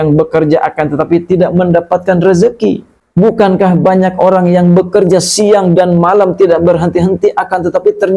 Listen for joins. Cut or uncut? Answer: uncut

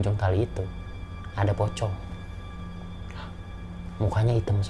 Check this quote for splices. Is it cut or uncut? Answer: uncut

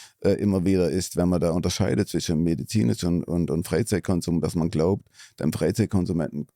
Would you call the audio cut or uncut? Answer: uncut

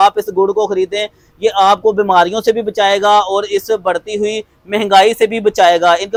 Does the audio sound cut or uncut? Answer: uncut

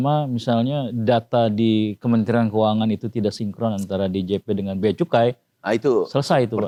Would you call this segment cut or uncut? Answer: uncut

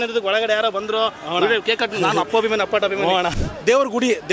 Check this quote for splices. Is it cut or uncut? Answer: cut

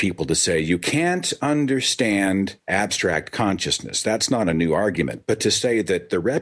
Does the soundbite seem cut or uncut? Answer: cut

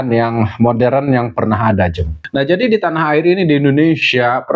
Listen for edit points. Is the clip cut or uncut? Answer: cut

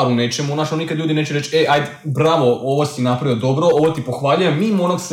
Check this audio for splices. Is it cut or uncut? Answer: uncut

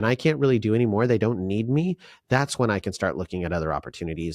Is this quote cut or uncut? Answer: uncut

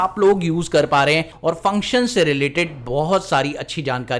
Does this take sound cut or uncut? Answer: cut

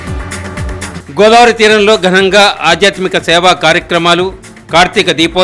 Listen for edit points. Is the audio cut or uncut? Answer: cut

